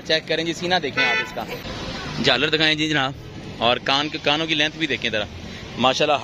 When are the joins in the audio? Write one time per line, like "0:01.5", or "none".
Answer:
0:01.6